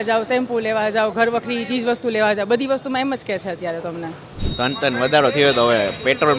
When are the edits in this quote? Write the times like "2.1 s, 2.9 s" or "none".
4.4 s